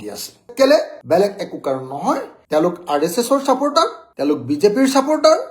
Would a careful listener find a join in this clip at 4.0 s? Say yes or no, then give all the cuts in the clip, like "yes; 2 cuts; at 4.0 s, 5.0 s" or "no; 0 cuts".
no; 1 cut; at 2.3 s